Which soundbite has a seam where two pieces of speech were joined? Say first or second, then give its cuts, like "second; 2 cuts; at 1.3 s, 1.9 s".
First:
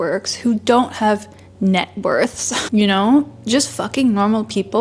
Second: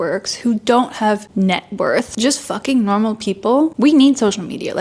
second; 3 cuts; at 1.3 s, 2.1 s, 3.7 s